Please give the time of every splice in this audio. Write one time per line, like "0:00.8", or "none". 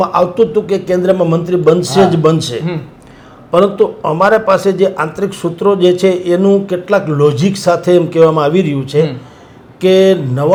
none